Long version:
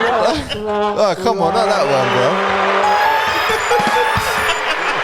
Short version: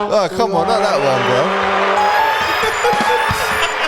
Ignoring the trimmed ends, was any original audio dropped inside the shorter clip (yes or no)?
no